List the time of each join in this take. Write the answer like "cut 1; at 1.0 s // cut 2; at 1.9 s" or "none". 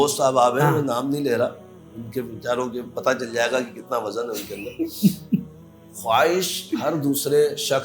none